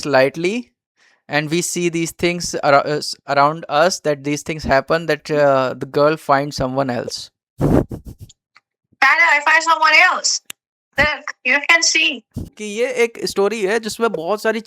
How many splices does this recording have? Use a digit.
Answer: 1